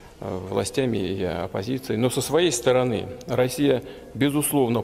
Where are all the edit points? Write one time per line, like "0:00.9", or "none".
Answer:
0:02.5